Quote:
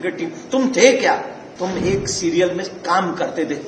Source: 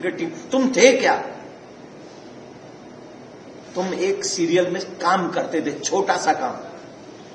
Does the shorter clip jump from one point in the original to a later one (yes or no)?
yes